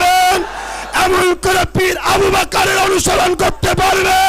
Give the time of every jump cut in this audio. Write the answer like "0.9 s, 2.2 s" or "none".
none